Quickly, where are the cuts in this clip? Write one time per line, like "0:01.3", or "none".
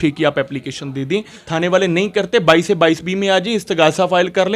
0:01.4